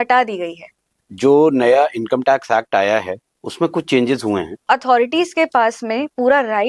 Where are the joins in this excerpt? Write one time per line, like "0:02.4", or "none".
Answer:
0:01.1
0:04.7